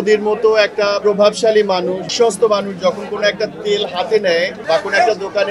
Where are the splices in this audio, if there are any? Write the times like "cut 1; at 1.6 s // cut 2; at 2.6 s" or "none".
none